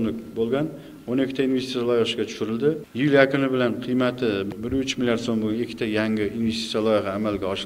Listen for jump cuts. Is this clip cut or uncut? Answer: cut